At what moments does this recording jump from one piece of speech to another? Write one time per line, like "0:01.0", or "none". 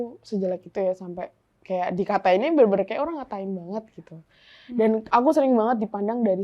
none